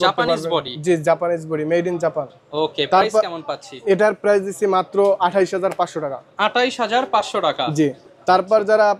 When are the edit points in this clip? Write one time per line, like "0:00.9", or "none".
none